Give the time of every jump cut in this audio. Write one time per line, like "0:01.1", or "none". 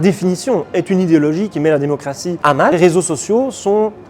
0:02.6